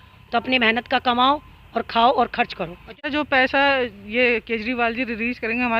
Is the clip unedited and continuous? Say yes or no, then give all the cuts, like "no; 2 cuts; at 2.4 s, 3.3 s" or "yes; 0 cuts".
no; 1 cut; at 3.1 s